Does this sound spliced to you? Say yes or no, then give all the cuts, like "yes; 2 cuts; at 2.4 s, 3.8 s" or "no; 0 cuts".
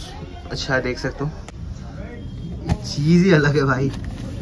yes; 1 cut; at 1.4 s